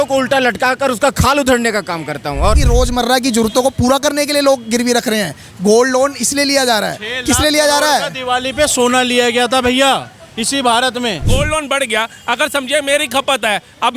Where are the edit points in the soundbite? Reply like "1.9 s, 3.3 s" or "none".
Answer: 2.6 s, 11.3 s